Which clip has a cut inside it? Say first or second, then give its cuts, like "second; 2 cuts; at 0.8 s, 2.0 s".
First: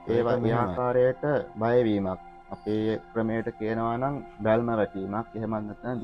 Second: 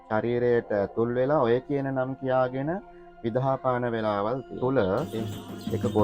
second; 1 cut; at 4.5 s